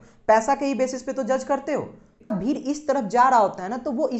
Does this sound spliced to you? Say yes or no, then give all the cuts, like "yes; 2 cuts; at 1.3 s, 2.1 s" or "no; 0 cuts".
yes; 1 cut; at 2.3 s